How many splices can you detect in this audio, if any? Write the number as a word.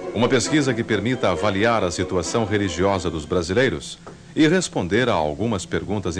one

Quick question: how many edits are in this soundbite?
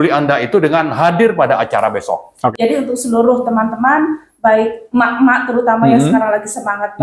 one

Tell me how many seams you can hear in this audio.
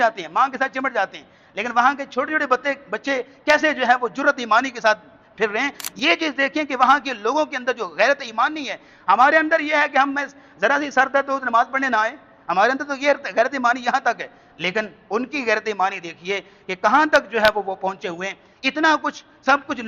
one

